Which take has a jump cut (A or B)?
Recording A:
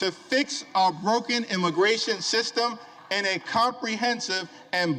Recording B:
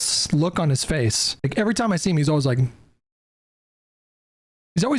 B